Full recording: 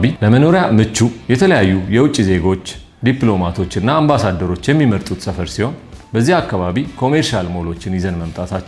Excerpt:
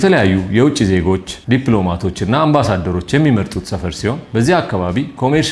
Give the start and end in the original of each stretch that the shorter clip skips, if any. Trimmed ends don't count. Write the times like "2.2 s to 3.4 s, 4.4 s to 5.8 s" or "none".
2.7 s to 2.9 s, 5.8 s to 6.0 s